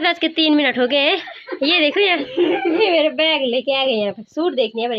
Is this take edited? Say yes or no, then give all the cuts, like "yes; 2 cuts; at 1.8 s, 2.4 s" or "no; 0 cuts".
yes; 1 cut; at 2.8 s